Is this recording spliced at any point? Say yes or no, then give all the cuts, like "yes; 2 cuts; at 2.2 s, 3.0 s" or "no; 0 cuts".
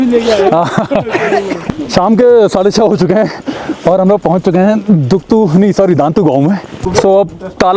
yes; 2 cuts; at 1.6 s, 6.7 s